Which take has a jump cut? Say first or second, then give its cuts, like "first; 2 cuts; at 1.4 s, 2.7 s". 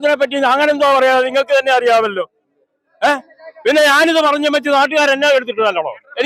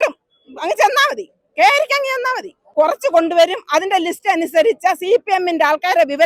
second; 1 cut; at 2.6 s